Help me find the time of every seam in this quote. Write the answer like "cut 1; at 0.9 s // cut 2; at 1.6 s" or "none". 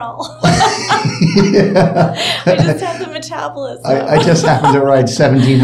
none